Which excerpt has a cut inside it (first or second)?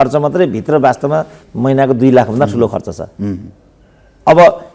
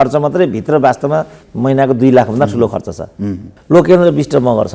second